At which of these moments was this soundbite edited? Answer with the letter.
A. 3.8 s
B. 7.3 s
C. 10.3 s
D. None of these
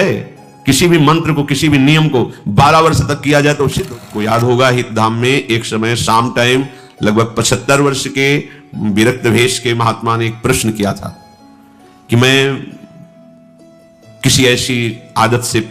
A